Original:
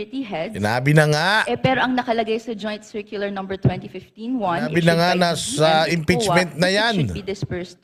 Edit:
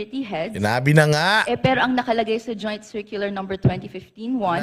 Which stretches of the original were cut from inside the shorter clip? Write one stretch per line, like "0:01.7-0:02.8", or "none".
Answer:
none